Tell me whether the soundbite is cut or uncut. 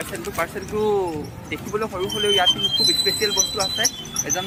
uncut